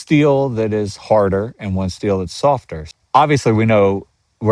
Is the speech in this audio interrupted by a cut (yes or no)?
yes